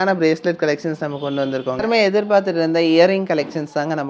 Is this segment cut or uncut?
cut